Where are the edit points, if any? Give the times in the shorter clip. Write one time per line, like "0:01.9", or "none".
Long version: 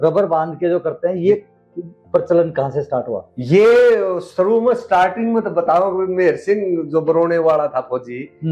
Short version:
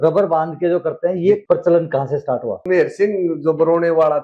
0:01.4
0:02.6

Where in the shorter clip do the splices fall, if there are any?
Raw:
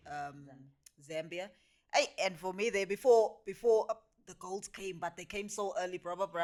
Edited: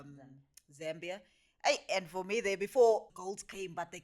0:03.1

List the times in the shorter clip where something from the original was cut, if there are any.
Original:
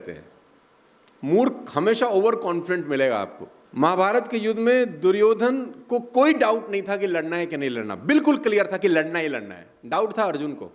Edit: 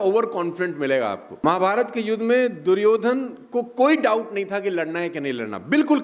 0:01.3

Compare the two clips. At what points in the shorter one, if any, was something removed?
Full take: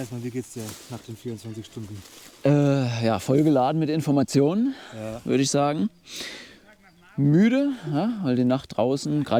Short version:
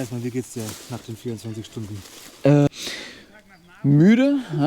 0:02.7

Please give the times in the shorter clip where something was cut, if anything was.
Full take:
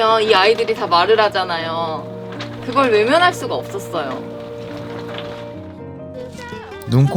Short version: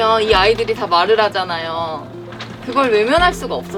none

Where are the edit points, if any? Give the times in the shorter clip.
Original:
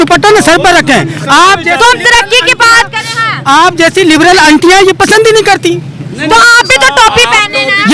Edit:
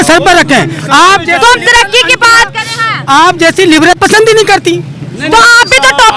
0:04.0

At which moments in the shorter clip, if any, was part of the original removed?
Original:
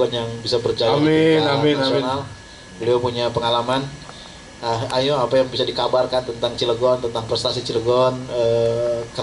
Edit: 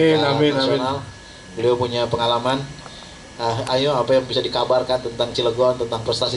none

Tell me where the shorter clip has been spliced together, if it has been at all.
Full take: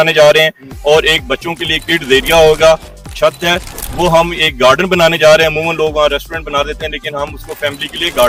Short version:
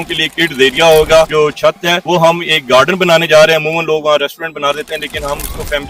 0:01.7

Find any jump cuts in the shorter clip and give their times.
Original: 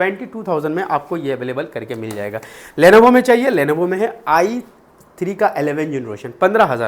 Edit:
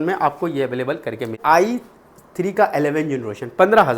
0:01.4

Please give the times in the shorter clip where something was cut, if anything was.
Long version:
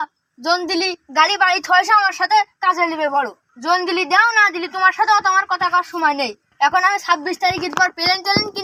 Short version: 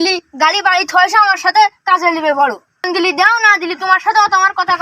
0:02.9

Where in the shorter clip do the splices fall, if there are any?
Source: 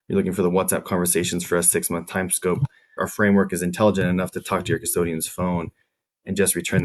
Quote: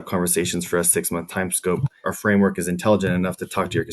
0:01.9

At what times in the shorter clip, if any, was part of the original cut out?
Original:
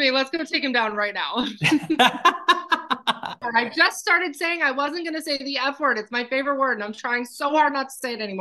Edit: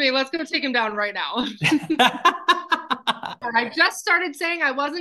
none

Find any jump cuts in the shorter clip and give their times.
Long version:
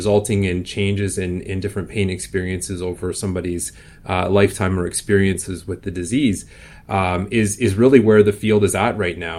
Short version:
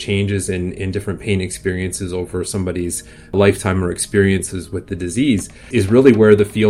0:03.3
0:05.7

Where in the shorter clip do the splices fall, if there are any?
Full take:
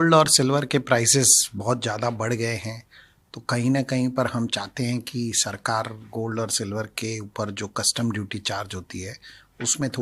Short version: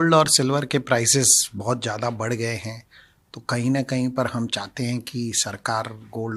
none

